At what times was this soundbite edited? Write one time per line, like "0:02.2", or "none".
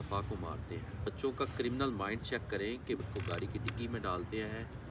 0:01.1
0:03.1